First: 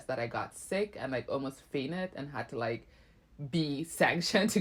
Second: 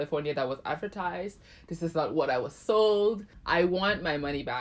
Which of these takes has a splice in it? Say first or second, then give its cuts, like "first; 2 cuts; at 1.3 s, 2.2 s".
second; 1 cut; at 3.3 s